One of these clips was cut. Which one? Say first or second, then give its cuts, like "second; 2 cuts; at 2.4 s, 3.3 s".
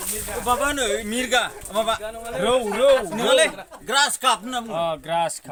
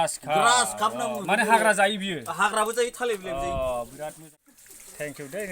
second; 1 cut; at 4.2 s